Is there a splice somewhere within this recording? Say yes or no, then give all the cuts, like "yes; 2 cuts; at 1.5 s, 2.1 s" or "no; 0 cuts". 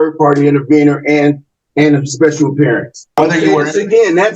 yes; 1 cut; at 3.2 s